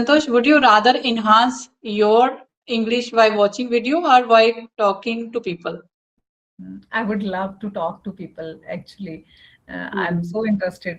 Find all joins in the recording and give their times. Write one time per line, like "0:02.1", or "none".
none